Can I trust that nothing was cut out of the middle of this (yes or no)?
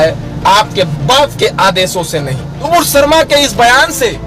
no